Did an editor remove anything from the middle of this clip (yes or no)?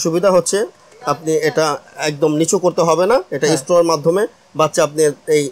no